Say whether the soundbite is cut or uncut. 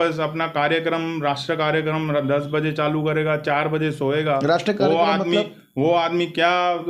uncut